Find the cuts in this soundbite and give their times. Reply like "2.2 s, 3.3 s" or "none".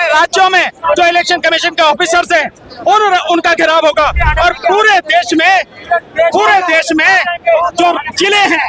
none